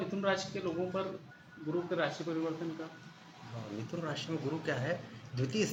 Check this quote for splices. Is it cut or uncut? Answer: uncut